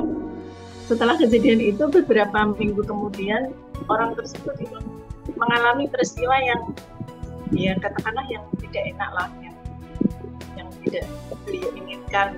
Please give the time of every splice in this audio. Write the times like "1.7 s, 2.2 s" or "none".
none